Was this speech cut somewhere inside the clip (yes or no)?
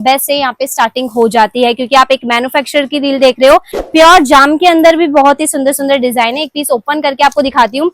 yes